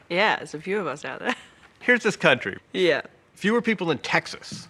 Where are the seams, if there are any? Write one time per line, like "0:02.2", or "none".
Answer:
0:02.6